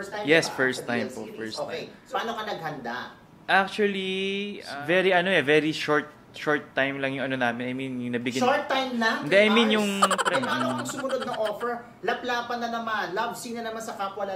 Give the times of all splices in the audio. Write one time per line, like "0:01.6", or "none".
0:01.9
0:04.6
0:10.2

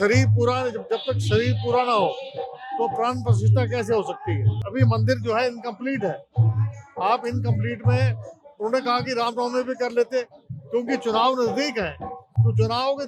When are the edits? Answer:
none

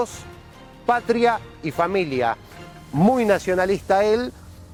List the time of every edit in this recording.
none

